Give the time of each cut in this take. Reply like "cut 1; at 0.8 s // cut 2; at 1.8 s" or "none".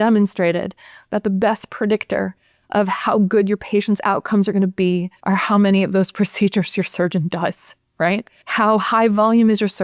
cut 1; at 5.1 s // cut 2; at 8.4 s